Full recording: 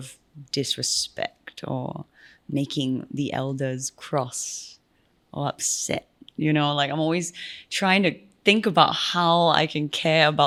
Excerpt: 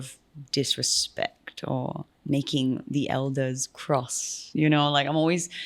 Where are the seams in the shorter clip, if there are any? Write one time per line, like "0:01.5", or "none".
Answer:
0:02.1
0:04.3